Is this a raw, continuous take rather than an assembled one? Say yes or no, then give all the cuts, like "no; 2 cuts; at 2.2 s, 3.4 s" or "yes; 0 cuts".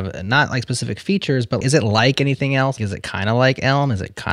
no; 2 cuts; at 1.6 s, 2.8 s